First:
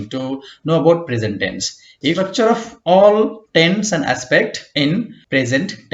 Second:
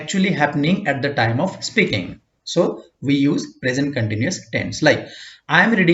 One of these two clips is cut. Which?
first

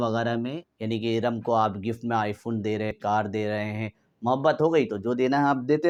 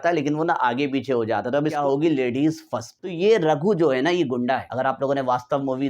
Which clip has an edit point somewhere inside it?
second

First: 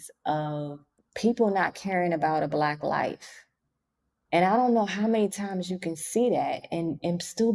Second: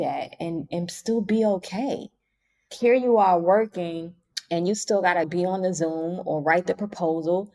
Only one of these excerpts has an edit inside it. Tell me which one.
second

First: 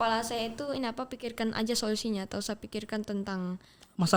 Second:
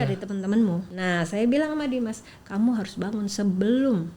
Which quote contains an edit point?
second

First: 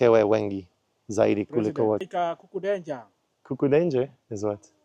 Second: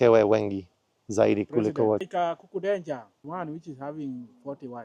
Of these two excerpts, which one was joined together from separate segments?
second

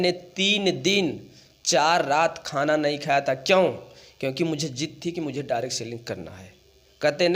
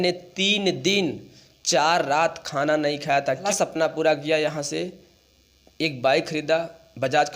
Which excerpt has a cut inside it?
second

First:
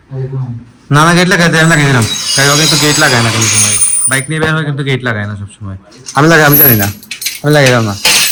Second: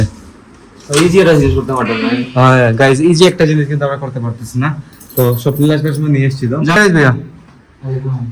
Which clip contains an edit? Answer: second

